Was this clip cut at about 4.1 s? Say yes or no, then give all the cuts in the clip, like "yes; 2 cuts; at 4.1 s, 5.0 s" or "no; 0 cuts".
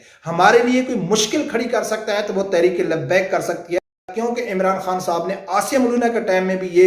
yes; 1 cut; at 4.1 s